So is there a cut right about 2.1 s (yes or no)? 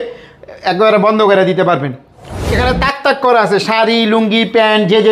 yes